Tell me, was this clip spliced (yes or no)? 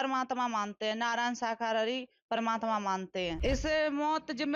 yes